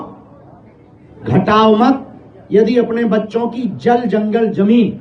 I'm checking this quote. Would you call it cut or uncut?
uncut